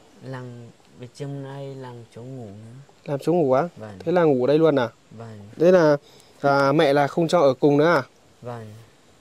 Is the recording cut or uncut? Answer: uncut